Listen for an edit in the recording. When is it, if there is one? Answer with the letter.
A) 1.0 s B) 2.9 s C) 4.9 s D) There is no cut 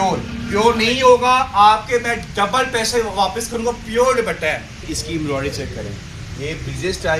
C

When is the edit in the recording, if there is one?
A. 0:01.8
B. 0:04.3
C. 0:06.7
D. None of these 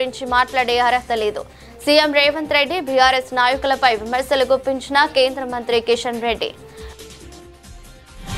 C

